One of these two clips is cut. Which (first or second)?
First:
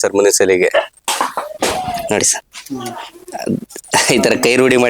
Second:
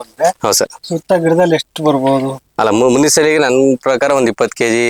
first